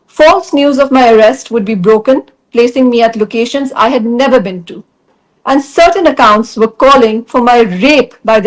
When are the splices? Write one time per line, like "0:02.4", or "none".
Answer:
0:05.2